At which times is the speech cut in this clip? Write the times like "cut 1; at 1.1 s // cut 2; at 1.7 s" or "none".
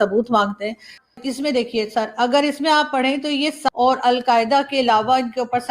cut 1; at 1.0 s // cut 2; at 3.6 s